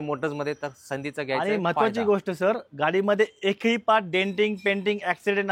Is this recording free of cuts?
yes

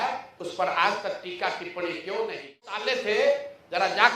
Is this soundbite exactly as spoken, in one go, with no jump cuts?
no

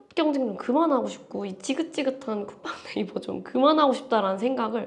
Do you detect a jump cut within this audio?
no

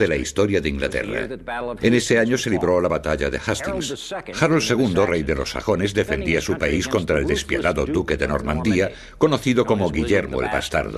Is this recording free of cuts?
yes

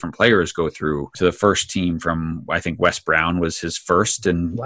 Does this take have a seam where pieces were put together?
yes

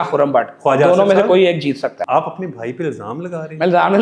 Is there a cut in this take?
yes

